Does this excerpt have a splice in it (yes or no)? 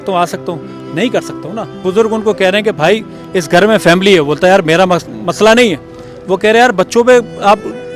yes